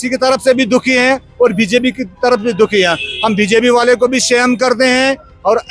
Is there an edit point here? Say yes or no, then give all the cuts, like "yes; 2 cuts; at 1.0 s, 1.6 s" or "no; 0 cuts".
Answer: no; 0 cuts